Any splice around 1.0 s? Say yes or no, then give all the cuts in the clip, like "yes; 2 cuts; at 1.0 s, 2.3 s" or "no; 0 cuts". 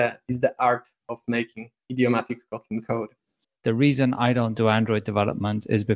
no; 1 cut; at 3.5 s